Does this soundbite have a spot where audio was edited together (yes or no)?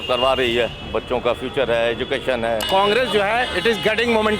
yes